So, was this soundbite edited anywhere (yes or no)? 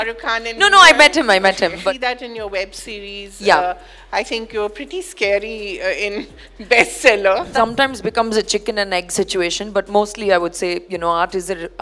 yes